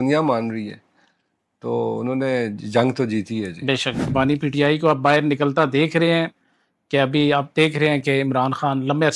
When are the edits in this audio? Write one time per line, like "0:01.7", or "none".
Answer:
0:04.1

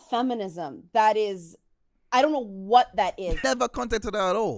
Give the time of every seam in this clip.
0:03.4

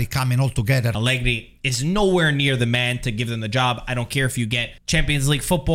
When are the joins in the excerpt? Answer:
0:00.9
0:04.7

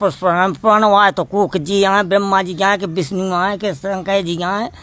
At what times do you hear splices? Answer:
none

